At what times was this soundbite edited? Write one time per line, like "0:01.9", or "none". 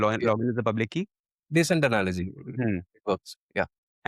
none